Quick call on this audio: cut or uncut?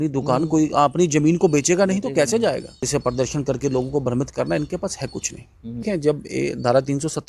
cut